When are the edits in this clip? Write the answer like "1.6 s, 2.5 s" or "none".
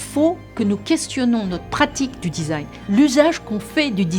none